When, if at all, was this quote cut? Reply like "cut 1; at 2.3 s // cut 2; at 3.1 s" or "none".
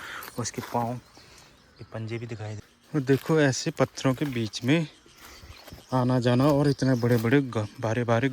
cut 1; at 2.6 s

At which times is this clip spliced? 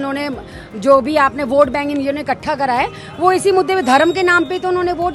none

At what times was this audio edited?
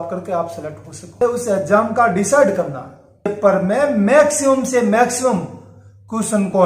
cut 1; at 1.2 s // cut 2; at 3.3 s

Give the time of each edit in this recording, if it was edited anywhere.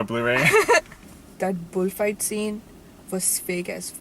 cut 1; at 0.9 s

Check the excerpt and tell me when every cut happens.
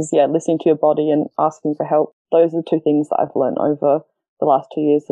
cut 1; at 2.1 s

